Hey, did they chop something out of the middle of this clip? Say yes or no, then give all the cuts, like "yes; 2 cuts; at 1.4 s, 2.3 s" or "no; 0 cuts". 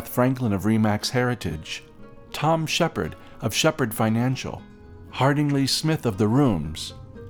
no; 0 cuts